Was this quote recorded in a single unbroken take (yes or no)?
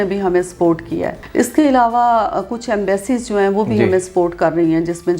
yes